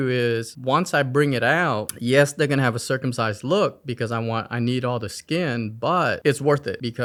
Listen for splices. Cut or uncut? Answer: uncut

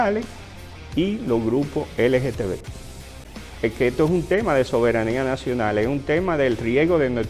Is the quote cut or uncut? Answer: cut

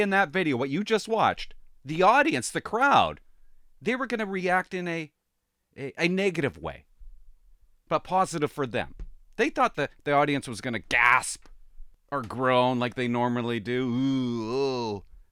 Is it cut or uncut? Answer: uncut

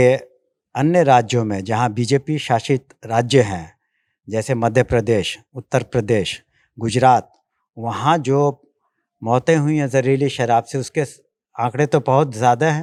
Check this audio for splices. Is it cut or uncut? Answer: uncut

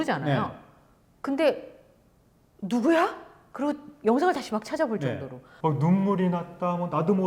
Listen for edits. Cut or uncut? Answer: cut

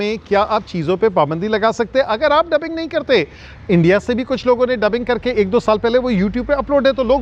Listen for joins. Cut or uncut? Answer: uncut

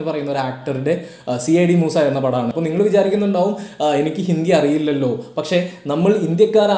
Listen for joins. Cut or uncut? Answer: cut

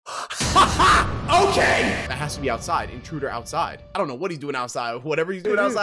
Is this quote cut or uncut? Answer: uncut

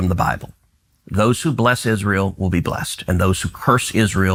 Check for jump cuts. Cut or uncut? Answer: uncut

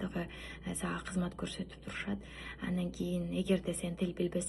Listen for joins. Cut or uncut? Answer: uncut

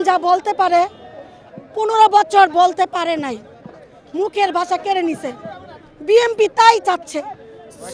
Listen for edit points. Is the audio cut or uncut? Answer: uncut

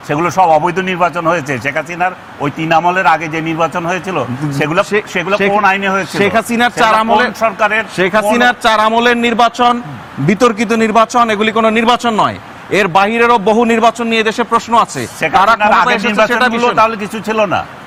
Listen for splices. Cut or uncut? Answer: uncut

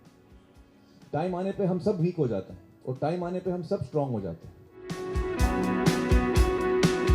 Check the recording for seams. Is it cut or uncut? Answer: cut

